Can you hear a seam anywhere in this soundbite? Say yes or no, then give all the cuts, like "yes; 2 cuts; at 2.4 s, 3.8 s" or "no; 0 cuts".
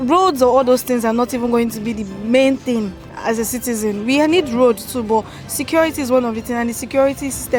no; 0 cuts